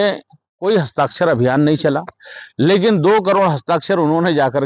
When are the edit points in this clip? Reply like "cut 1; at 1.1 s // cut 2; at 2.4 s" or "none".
none